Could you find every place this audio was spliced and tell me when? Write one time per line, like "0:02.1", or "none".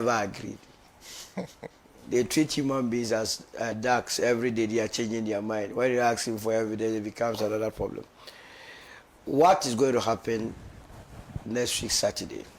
none